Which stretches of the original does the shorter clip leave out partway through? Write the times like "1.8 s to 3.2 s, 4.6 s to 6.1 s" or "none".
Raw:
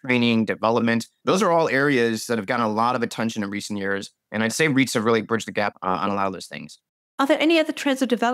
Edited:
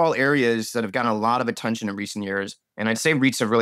none